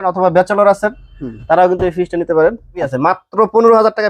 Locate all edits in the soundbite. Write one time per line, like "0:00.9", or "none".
0:02.9